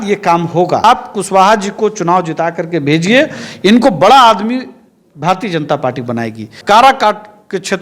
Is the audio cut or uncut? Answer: cut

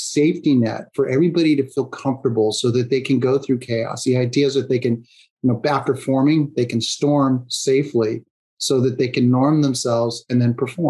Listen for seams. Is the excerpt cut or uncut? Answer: uncut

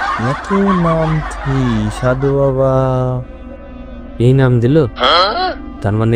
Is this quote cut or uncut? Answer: uncut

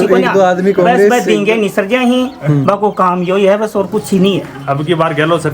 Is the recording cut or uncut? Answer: cut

